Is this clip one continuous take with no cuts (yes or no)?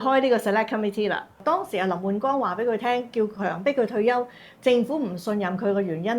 no